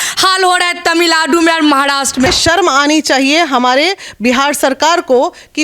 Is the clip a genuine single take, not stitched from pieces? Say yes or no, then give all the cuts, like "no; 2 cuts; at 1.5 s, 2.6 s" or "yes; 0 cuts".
no; 1 cut; at 2.3 s